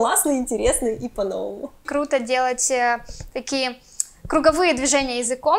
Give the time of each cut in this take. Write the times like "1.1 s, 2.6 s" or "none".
1.8 s